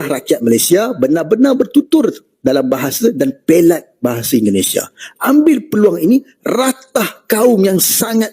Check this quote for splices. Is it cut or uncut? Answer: uncut